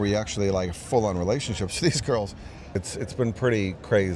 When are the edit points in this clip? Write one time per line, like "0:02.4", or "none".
0:02.8